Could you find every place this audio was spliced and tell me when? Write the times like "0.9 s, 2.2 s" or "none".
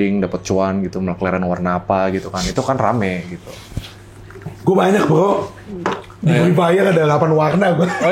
none

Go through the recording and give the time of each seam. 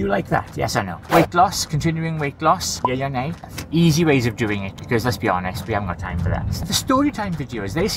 0.9 s, 3.4 s, 6.5 s

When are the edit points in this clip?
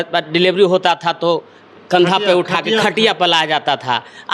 none

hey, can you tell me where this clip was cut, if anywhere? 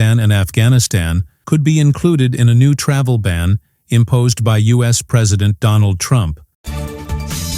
6.5 s

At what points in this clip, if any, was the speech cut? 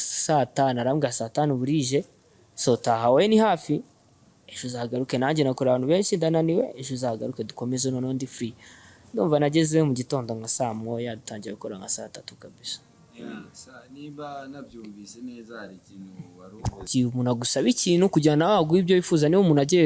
16.9 s

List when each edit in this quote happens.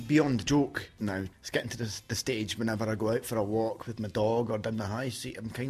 1.3 s

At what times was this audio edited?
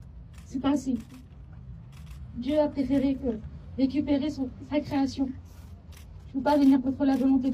6.2 s

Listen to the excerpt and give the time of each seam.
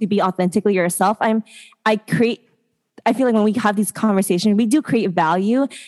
none

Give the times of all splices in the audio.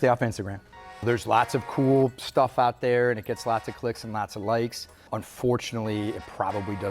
1.0 s, 5.1 s

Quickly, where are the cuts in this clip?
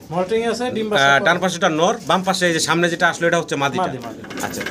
none

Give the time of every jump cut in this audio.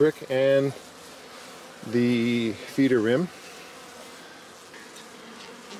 4.7 s

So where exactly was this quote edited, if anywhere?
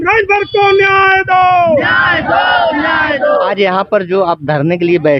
3.5 s

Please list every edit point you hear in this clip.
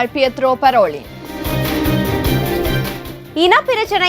1.3 s, 3.0 s

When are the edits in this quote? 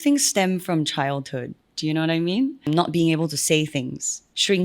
2.6 s

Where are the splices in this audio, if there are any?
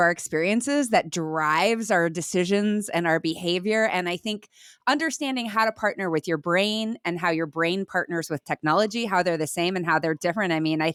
none

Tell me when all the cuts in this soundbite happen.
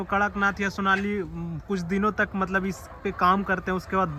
none

